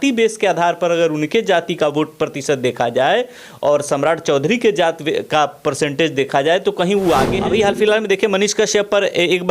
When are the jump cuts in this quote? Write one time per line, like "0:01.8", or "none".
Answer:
0:07.3